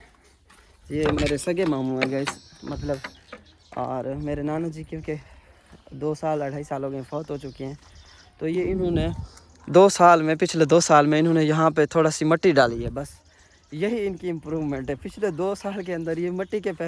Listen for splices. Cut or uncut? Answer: uncut